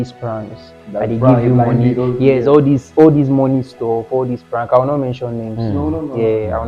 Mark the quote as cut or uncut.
uncut